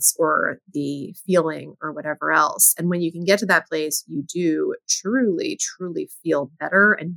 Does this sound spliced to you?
no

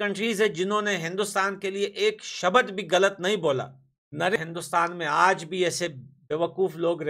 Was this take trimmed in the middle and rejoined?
yes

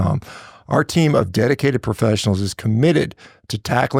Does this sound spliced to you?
no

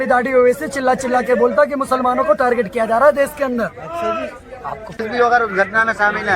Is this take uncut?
no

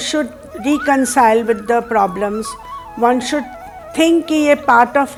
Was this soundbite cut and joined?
no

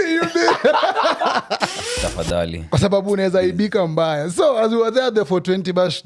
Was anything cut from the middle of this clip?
yes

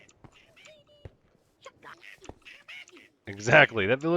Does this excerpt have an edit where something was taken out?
yes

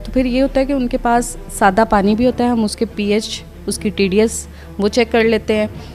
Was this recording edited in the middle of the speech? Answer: no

